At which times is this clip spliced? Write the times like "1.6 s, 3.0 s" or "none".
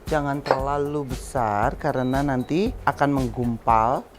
2.8 s